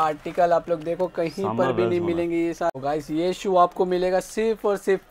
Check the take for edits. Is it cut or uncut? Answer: cut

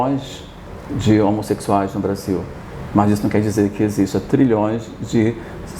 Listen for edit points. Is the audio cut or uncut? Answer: uncut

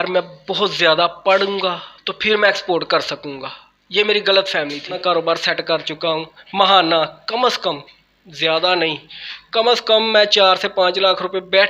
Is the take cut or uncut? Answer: cut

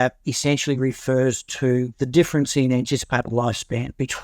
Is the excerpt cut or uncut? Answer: cut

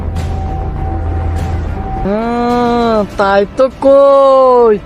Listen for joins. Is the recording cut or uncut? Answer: cut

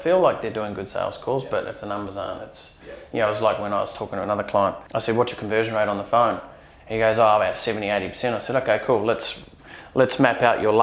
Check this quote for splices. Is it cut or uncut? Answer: cut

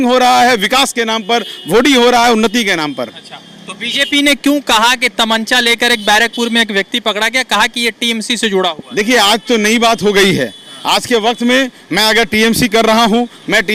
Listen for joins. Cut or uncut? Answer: uncut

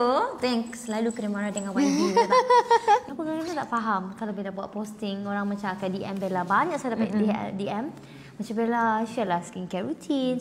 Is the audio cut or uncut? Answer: cut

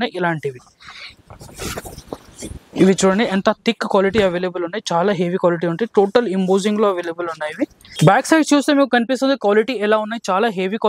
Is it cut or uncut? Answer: uncut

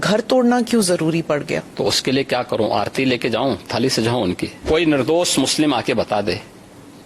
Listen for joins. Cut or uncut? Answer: cut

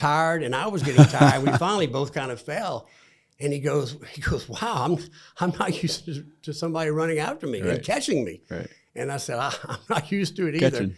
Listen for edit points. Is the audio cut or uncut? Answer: uncut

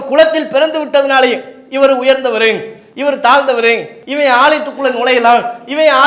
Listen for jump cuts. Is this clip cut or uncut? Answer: cut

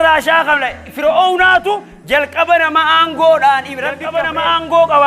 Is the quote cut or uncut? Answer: cut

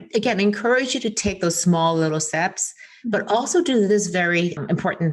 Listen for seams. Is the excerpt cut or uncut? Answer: uncut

